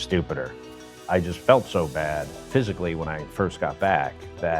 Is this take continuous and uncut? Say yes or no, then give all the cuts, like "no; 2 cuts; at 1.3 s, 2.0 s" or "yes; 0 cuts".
no; 2 cuts; at 0.9 s, 2.3 s